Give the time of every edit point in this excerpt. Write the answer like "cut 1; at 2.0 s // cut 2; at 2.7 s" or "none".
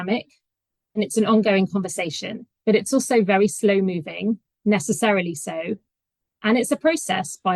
none